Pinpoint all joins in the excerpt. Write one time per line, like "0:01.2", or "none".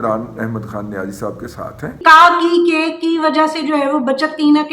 0:02.0